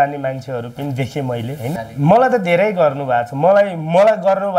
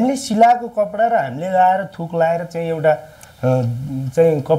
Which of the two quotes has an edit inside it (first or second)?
first